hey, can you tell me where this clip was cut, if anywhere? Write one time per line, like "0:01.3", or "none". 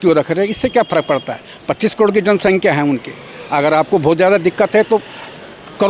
none